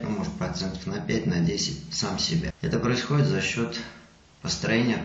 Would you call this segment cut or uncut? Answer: cut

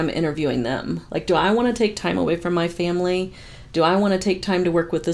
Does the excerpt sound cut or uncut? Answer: uncut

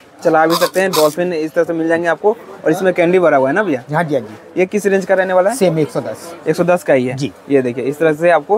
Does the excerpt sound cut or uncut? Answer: uncut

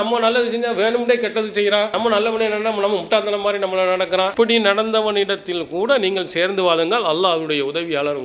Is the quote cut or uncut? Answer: uncut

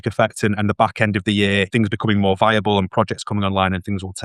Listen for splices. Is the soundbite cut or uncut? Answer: cut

